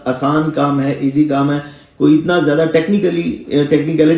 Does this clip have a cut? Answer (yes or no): no